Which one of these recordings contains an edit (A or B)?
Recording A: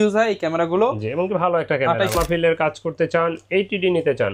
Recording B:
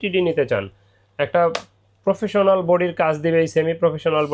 A